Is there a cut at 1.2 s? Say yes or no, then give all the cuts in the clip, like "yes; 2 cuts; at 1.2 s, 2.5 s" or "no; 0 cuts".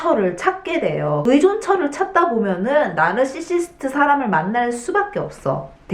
yes; 1 cut; at 1.2 s